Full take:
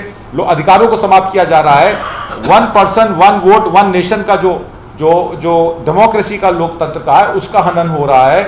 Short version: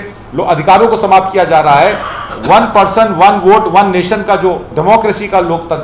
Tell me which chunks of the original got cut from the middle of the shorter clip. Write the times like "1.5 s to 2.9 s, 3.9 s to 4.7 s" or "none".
4.7 s to 5.8 s

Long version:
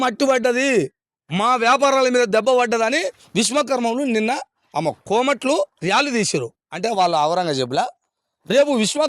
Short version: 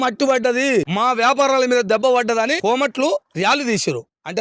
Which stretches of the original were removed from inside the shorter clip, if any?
0.9 s to 1.3 s, 3.0 s to 5.0 s

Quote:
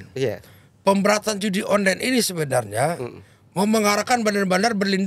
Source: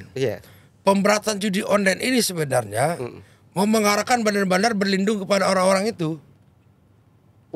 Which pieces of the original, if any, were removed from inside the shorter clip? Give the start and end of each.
none

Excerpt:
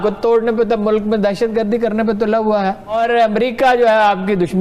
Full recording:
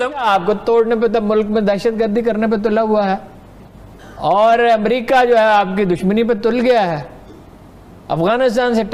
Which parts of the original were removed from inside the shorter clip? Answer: 3.4 s to 4.4 s

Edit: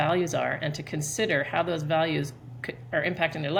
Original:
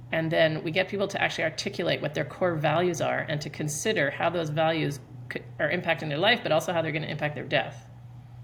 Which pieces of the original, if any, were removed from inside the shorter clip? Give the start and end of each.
none

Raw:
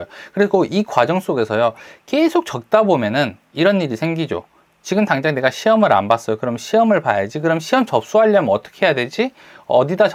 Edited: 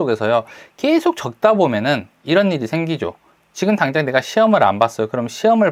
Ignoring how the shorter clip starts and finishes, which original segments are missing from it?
none

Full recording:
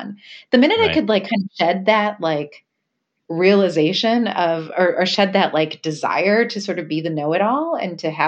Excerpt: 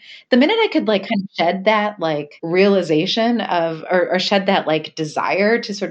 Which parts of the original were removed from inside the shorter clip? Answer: 2.5 s to 3.2 s

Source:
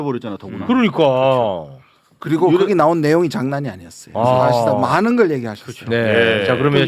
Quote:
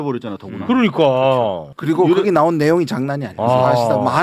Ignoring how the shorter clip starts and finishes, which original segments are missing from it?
1.7 s to 2.1 s, 3.7 s to 4.0 s

